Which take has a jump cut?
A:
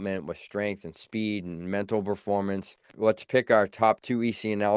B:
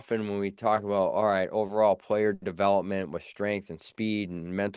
A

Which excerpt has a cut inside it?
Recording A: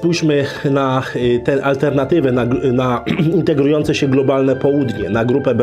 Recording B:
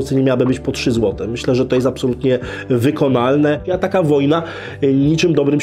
B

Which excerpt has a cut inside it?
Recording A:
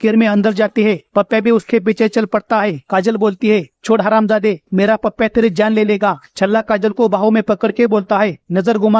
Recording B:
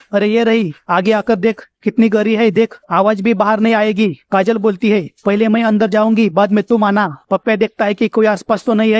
A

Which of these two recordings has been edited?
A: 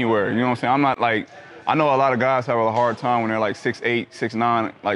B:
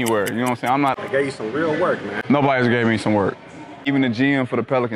B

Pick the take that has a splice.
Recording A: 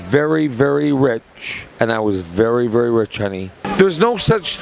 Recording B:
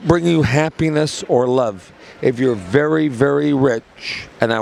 A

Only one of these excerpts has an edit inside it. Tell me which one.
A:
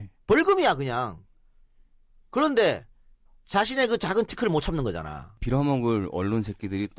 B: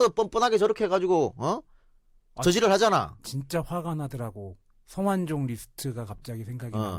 A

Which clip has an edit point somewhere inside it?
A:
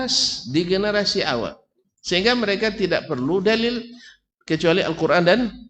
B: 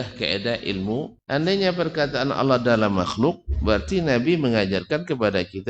B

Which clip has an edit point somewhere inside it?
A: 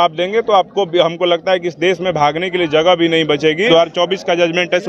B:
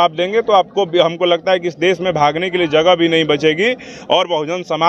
A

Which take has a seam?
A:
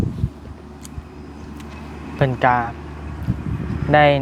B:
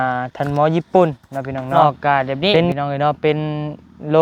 B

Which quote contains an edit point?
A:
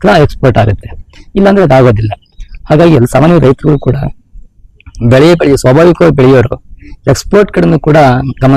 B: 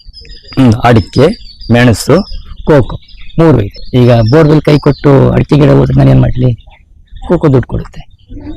B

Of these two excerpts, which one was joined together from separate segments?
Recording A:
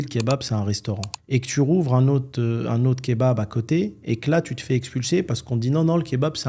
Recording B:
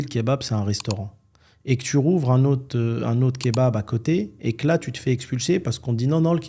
A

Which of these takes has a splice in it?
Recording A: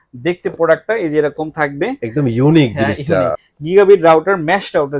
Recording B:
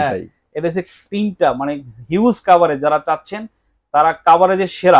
A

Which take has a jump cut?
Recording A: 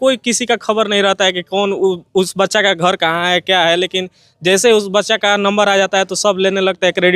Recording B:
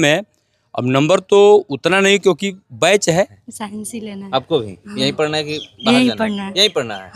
B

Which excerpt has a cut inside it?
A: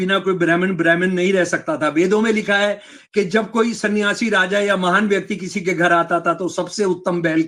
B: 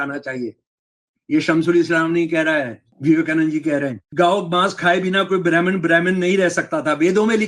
B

